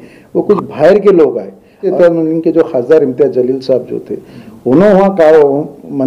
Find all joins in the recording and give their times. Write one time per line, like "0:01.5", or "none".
0:01.9